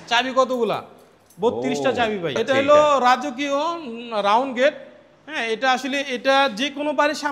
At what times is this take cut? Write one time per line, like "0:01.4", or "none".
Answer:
0:02.4